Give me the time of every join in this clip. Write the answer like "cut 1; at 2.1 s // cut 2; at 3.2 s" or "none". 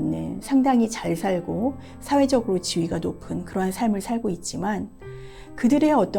none